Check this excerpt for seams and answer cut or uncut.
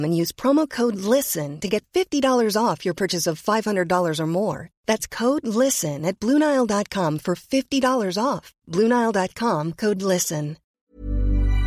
cut